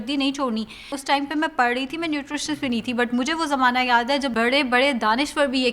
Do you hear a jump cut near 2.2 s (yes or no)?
no